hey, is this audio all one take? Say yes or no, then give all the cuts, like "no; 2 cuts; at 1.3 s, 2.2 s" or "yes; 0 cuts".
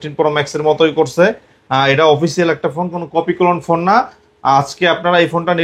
yes; 0 cuts